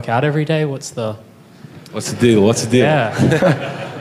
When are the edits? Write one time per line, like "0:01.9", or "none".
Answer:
none